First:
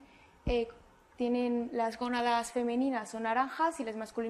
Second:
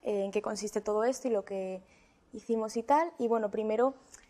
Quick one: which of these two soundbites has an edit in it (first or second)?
second